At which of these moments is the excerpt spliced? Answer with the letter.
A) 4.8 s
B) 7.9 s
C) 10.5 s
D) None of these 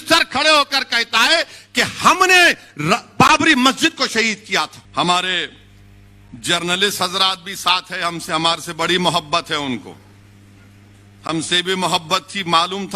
A